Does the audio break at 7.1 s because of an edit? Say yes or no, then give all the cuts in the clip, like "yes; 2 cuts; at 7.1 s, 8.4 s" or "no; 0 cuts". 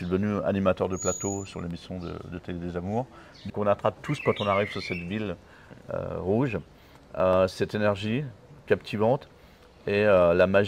no; 1 cut; at 3.4 s